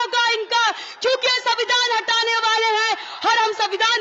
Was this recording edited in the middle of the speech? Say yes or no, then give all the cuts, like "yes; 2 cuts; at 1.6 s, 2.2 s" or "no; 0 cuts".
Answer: no; 0 cuts